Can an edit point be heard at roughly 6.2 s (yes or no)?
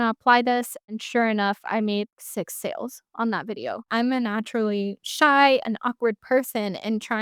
no